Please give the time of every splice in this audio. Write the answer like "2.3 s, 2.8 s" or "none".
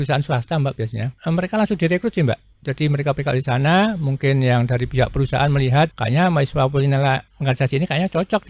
1.1 s, 6.0 s, 7.3 s